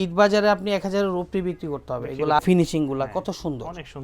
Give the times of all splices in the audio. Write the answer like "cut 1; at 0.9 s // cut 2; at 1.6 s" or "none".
cut 1; at 2.4 s